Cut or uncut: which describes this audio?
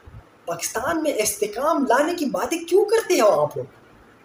uncut